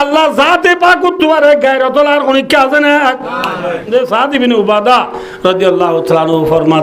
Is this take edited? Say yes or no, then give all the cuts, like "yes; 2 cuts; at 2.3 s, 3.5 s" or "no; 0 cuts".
yes; 1 cut; at 3.9 s